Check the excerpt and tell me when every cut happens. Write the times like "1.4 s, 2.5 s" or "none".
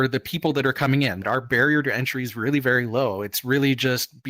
1.2 s